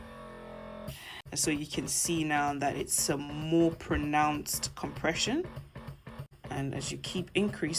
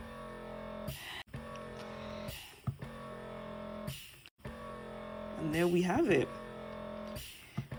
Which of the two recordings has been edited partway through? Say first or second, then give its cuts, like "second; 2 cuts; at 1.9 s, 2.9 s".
first; 2 cuts; at 1.3 s, 6.3 s